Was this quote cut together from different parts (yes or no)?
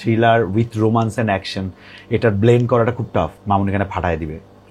yes